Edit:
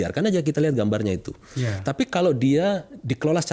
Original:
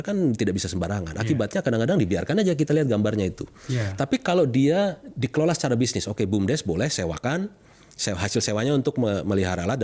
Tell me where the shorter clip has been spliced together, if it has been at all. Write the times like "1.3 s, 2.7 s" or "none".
none